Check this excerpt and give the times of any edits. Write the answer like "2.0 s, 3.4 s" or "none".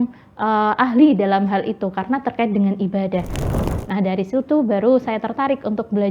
3.4 s